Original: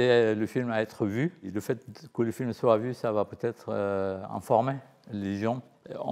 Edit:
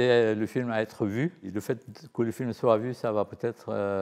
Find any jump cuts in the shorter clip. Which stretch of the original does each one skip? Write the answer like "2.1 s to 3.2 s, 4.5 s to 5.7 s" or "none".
none